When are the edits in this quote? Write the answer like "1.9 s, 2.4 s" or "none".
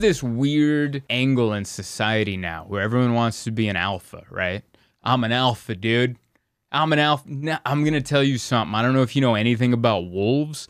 1.0 s